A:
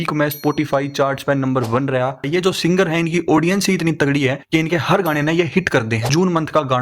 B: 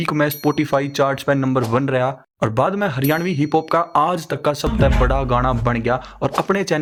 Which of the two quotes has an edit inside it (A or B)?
A